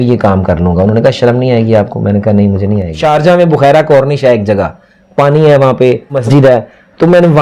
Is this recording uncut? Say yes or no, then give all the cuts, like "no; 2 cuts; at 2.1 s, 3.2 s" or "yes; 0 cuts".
no; 2 cuts; at 2.9 s, 6.2 s